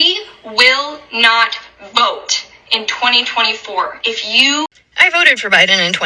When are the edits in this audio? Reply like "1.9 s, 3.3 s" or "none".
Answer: 4.8 s

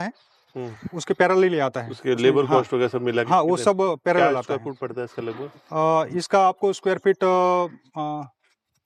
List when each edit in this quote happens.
none

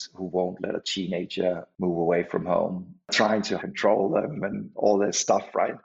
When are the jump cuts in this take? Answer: 1.7 s, 3.1 s

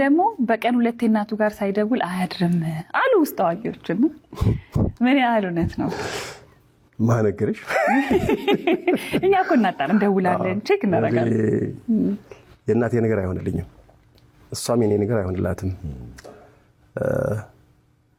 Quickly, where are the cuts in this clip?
none

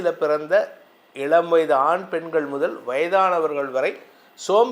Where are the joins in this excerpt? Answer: none

